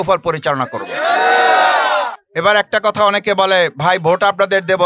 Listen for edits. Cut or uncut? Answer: cut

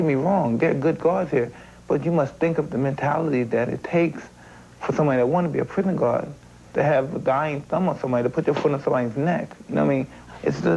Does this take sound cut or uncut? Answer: cut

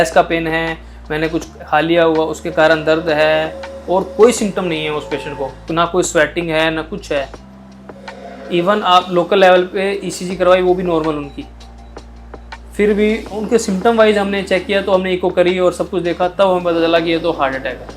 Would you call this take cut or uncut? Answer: uncut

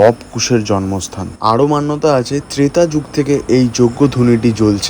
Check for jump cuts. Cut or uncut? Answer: uncut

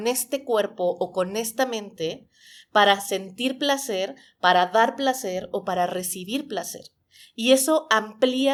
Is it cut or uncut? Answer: uncut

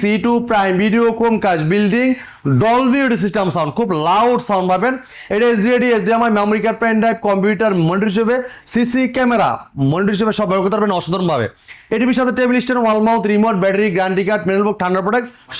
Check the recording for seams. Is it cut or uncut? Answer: uncut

